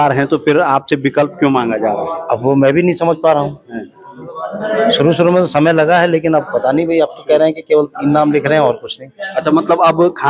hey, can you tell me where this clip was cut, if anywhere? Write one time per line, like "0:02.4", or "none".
none